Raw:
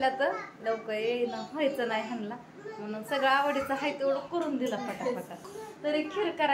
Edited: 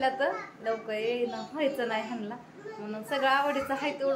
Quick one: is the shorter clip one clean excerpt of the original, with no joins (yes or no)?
yes